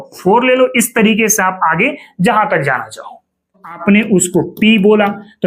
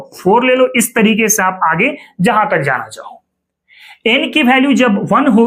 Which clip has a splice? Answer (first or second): first